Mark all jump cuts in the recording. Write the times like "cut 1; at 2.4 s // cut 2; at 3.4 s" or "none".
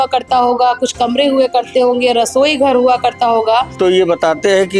cut 1; at 3.7 s